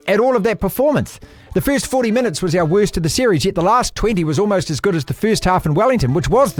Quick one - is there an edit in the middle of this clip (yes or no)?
no